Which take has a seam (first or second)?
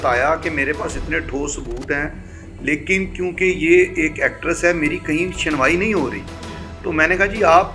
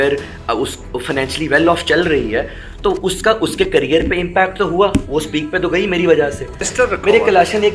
second